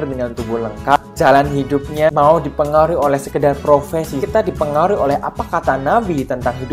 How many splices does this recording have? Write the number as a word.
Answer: three